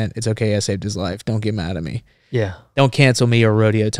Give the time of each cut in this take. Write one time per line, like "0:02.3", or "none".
none